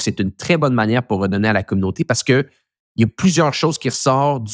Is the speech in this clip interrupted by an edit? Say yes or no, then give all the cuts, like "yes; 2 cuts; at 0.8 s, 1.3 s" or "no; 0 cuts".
no; 0 cuts